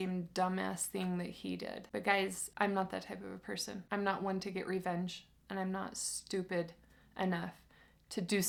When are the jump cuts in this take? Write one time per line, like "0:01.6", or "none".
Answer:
none